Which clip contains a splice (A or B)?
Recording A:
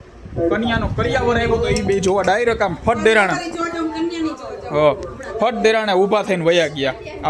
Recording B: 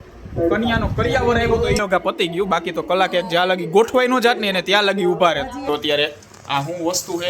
B